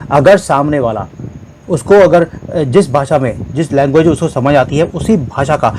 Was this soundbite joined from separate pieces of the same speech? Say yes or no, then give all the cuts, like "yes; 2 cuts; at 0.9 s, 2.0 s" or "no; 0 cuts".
no; 0 cuts